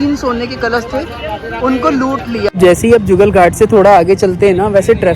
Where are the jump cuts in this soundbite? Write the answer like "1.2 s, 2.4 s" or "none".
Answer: 2.5 s